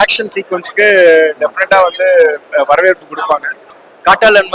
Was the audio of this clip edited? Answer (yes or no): no